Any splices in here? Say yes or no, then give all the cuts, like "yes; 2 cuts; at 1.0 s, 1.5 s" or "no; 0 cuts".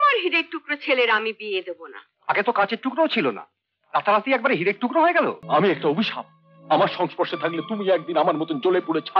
yes; 1 cut; at 5.4 s